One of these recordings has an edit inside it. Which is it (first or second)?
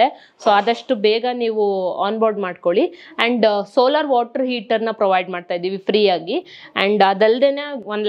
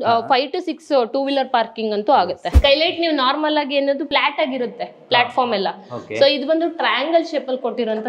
second